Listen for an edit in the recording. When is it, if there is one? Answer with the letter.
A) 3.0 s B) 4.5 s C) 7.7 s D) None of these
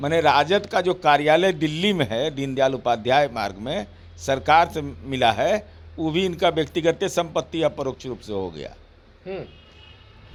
D